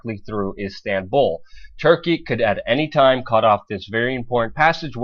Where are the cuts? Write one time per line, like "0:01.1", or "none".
0:01.7